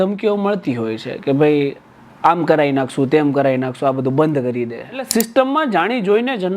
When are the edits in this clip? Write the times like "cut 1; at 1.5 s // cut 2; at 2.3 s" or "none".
cut 1; at 5.1 s